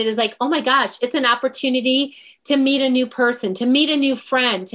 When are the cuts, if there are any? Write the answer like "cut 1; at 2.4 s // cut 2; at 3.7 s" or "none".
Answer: none